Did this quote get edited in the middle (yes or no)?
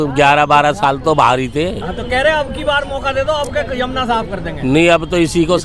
no